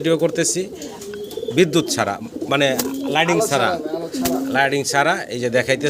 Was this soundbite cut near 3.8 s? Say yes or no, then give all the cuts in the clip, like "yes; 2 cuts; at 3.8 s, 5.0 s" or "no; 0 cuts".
no; 0 cuts